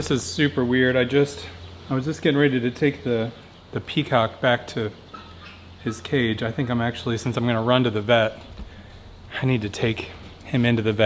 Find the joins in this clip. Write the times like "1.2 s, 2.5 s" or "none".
none